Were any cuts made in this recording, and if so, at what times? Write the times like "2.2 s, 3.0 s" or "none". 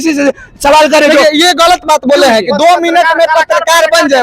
none